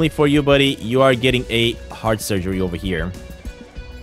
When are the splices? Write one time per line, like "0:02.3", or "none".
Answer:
none